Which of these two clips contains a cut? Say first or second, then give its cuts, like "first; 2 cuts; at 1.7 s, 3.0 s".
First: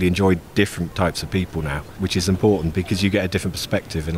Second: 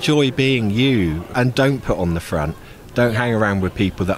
second; 1 cut; at 1.3 s